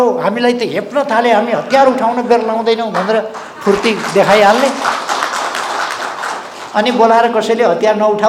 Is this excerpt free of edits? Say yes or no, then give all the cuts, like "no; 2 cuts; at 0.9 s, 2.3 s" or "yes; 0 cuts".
yes; 0 cuts